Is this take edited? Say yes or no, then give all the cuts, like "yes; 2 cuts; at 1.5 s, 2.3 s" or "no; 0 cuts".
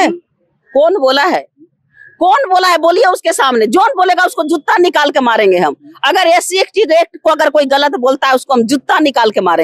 no; 0 cuts